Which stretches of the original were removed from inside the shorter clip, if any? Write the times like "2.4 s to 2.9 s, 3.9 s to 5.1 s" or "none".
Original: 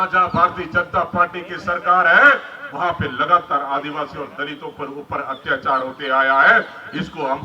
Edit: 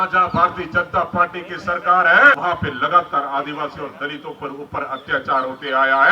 2.4 s to 2.8 s